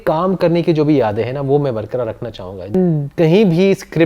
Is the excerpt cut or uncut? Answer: cut